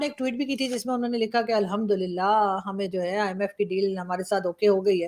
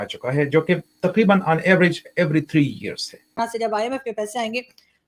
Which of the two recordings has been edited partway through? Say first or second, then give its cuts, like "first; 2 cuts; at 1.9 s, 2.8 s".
second; 1 cut; at 3.4 s